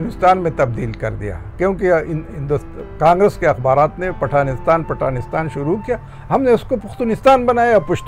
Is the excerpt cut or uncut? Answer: uncut